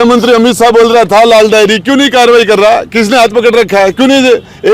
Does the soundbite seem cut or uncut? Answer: uncut